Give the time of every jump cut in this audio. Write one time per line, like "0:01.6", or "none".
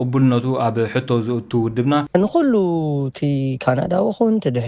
0:02.1